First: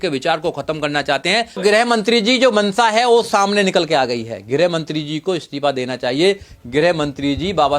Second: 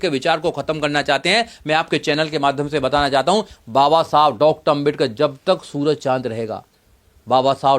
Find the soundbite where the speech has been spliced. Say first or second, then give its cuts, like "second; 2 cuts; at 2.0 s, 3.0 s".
first; 1 cut; at 1.6 s